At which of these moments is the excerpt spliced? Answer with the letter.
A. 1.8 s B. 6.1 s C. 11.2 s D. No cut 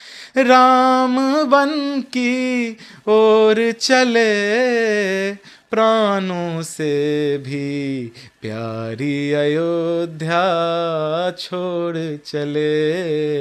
D